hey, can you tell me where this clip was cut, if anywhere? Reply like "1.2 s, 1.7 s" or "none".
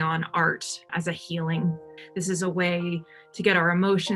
0.9 s, 1.9 s